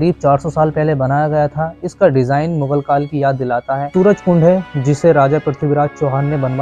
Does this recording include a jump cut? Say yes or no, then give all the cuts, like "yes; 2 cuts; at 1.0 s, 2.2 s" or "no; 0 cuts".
yes; 1 cut; at 3.9 s